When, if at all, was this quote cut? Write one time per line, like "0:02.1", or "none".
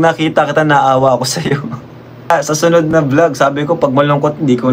0:02.3